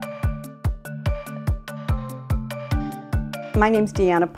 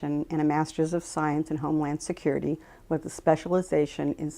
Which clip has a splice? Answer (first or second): second